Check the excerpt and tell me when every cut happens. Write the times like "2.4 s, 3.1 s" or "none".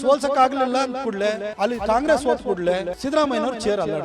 1.5 s, 2.9 s